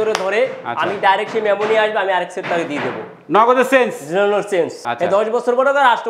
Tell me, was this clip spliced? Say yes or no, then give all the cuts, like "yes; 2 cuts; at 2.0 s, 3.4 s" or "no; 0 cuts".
yes; 1 cut; at 4.8 s